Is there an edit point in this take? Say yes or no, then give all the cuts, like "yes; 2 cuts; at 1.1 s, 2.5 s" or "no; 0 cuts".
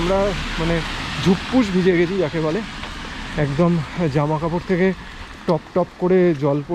no; 0 cuts